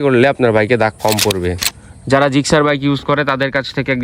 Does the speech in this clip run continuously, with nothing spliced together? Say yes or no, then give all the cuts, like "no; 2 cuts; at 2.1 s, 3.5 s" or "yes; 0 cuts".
no; 1 cut; at 1.5 s